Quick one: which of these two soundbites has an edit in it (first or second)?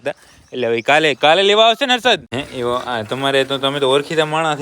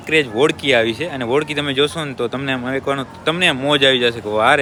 first